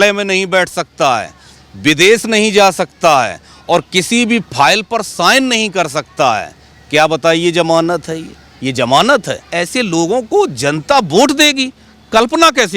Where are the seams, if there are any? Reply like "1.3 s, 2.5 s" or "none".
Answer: 9.4 s